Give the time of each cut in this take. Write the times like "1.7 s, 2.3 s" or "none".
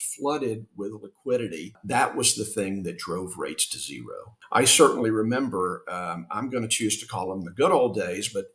1.8 s, 4.3 s